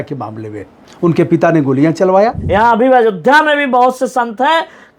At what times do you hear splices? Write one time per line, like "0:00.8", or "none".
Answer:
0:02.4